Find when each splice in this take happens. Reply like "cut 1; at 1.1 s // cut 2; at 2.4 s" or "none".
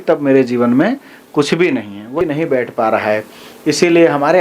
cut 1; at 2.2 s